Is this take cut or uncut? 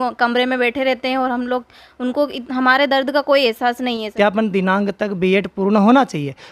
cut